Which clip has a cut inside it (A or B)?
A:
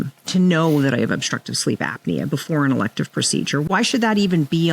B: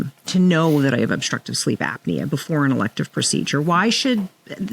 A